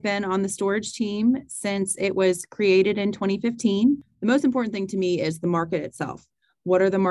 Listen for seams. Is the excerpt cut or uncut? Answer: cut